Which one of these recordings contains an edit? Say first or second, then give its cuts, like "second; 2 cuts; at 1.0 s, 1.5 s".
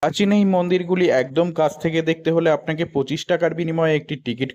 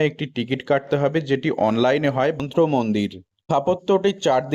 second; 1 cut; at 2.4 s